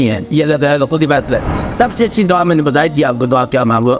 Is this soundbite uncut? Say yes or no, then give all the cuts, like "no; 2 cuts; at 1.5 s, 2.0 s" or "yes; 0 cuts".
no; 1 cut; at 1.6 s